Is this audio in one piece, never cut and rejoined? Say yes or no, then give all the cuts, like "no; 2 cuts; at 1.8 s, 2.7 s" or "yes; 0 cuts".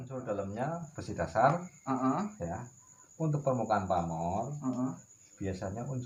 yes; 0 cuts